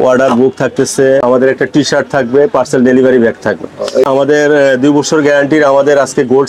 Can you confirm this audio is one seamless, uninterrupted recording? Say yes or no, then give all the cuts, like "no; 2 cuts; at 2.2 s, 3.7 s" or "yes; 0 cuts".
no; 2 cuts; at 1.2 s, 4.1 s